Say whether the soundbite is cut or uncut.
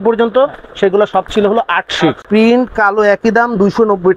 cut